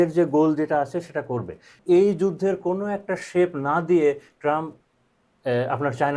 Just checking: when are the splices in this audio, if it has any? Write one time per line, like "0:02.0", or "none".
0:01.7